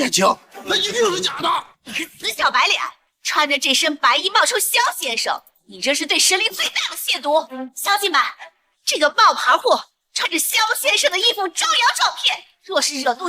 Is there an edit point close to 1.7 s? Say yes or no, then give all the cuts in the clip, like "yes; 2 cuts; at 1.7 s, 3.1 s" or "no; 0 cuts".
yes; 1 cut; at 1.7 s